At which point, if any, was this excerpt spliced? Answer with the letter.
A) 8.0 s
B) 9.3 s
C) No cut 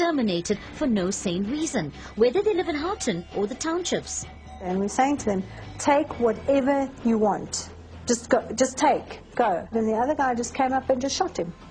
C